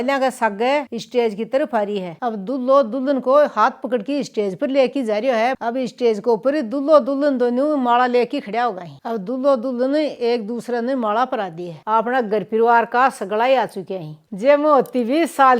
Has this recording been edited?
yes; 4 cuts; at 2.1 s, 5.6 s, 11.7 s, 14.2 s

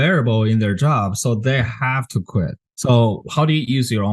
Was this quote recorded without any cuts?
no; 1 cut; at 2.6 s

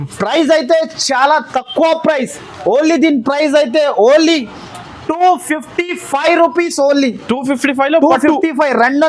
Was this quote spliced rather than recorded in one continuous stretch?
no; 0 cuts

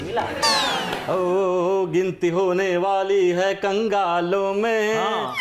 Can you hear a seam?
yes; 1 cut; at 1.0 s

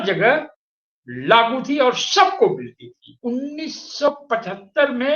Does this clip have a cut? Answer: yes; 1 cut; at 3.1 s

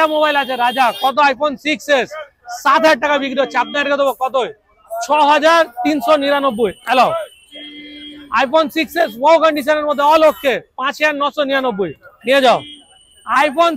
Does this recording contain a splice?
no; 0 cuts

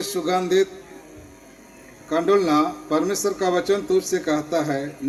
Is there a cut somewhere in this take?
no; 0 cuts

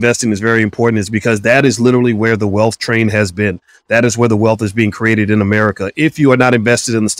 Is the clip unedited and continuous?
yes; 0 cuts

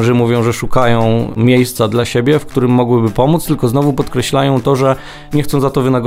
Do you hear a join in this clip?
yes; 1 cut; at 1.3 s

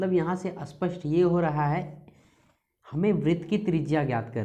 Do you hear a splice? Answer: no; 0 cuts

